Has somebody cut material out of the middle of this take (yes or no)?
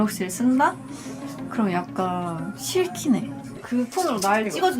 no